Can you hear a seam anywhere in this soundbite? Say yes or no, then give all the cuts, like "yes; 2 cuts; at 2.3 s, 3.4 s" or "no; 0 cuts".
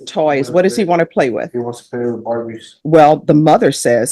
yes; 1 cut; at 2.5 s